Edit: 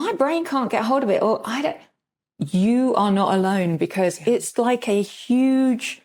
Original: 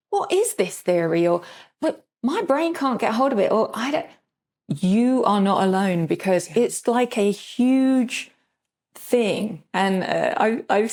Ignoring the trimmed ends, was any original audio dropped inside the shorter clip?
no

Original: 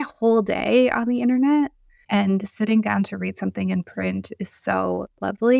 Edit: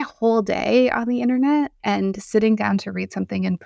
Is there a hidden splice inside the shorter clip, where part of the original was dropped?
yes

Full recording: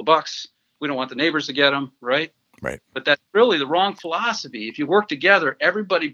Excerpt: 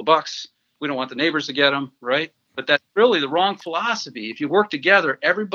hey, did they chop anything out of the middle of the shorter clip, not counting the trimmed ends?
yes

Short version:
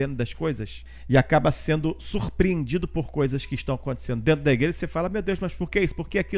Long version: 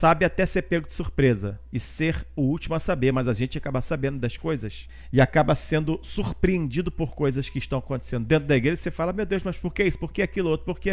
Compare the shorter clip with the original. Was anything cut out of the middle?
no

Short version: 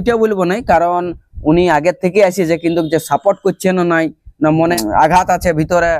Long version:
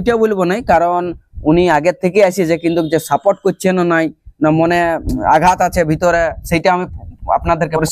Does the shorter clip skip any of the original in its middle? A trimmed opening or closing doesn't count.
yes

